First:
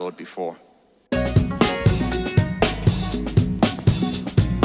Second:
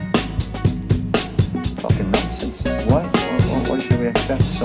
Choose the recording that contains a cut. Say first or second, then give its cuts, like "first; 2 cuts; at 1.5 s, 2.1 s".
first; 1 cut; at 1.0 s